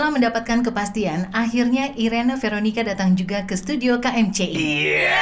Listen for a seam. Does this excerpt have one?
no; 0 cuts

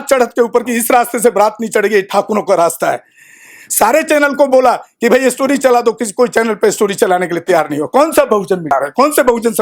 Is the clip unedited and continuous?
no; 1 cut; at 8.7 s

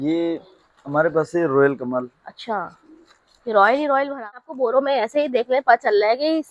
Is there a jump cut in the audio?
yes; 1 cut; at 4.4 s

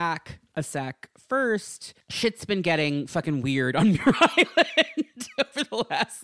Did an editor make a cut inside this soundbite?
no; 0 cuts

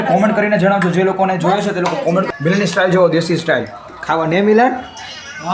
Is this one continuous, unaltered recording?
no; 1 cut; at 2.3 s

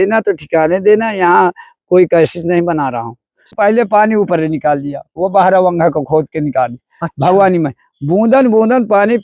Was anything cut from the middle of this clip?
yes; 1 cut; at 3.5 s

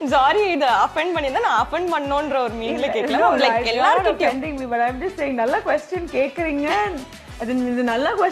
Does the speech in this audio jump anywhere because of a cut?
no; 0 cuts

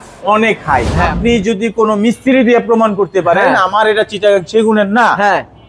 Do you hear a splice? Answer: yes; 1 cut; at 0.9 s

